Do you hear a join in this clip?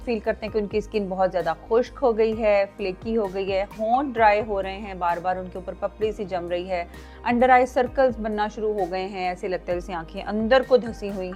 no; 0 cuts

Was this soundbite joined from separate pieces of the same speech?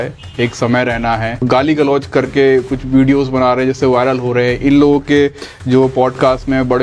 yes; 1 cut; at 1.4 s

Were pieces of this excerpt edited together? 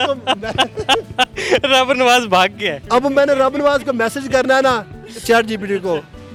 no; 0 cuts

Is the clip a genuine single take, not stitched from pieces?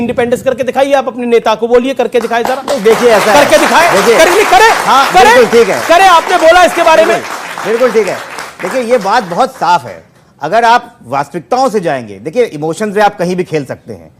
yes; 0 cuts

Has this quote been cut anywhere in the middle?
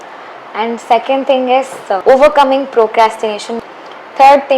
yes; 2 cuts; at 2.0 s, 3.6 s

